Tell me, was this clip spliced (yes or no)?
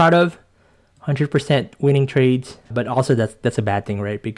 yes